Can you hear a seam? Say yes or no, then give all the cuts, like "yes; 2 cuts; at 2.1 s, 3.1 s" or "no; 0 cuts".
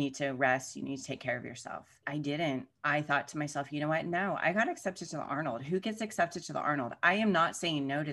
yes; 1 cut; at 2.0 s